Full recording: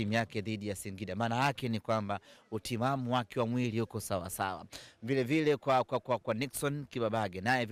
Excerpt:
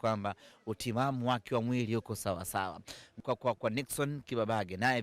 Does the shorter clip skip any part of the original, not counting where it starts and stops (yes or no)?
yes